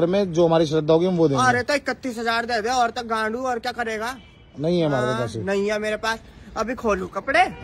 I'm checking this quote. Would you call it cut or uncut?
uncut